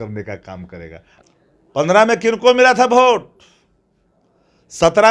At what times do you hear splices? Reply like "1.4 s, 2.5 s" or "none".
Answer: 1.1 s